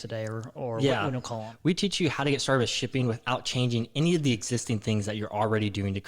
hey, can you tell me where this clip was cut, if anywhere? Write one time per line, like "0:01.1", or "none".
0:01.5